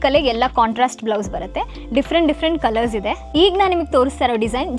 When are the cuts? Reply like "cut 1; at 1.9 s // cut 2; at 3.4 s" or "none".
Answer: cut 1; at 3.2 s

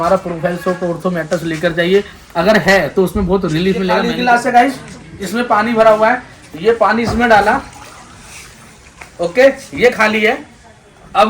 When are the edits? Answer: cut 1; at 4.1 s

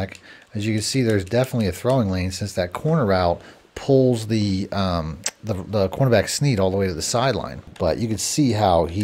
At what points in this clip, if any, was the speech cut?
cut 1; at 7.6 s

